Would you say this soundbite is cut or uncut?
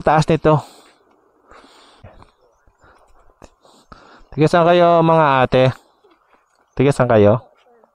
cut